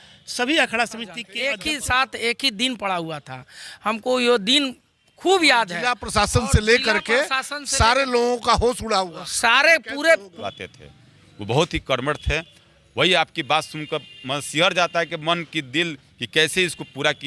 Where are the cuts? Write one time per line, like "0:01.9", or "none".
0:01.2
0:10.4